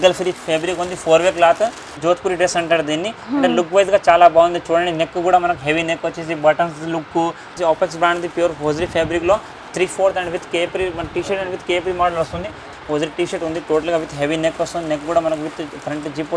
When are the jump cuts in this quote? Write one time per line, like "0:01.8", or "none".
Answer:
0:01.9
0:07.5
0:12.7

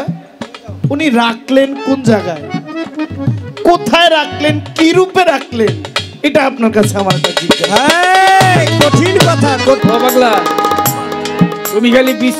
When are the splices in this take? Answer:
0:09.8

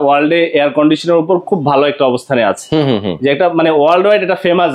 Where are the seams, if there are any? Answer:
none

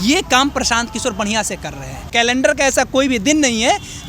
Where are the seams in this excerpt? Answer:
0:02.0

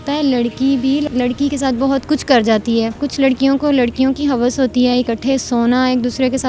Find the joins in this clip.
0:01.1
0:03.0

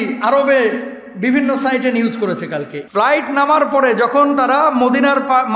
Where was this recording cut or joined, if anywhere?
0:02.8

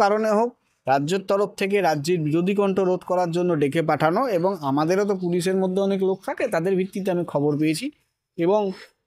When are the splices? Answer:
none

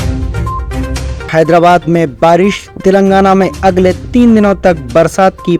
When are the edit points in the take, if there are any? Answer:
none

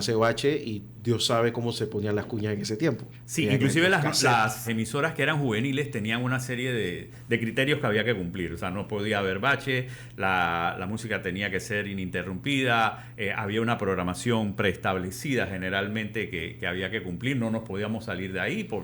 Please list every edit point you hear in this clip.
0:03.1
0:04.7

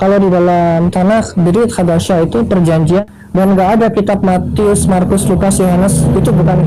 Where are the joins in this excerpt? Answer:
0:03.0

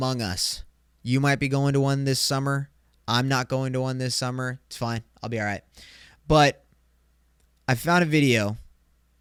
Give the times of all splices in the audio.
none

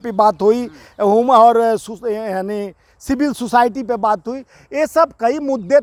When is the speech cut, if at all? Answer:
none

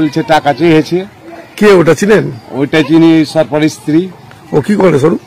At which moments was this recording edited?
none

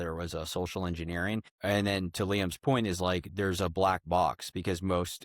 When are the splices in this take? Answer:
0:01.5

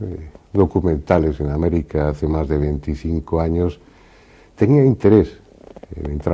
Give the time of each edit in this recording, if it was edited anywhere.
none

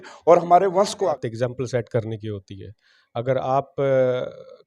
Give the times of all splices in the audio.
0:01.1

